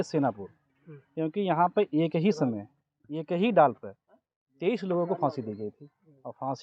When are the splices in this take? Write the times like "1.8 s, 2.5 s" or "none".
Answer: none